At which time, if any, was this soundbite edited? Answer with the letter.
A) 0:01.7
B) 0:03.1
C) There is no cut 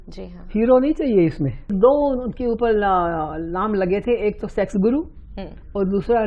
A